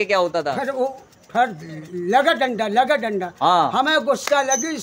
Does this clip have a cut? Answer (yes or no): no